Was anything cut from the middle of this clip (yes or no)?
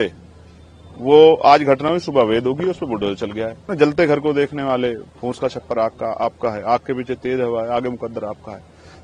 yes